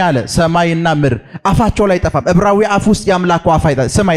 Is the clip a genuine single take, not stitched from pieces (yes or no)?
yes